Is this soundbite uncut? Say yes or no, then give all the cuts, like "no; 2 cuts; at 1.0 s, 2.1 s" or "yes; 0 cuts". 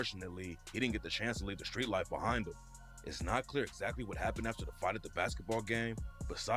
yes; 0 cuts